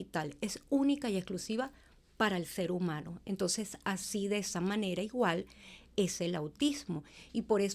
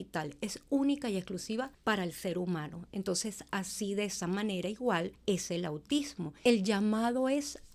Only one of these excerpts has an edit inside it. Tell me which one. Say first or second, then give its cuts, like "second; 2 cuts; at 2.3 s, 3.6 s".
second; 3 cuts; at 1.7 s, 5.1 s, 6.2 s